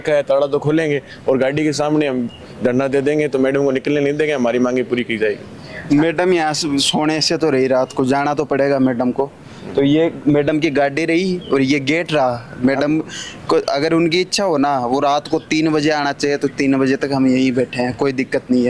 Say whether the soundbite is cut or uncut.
uncut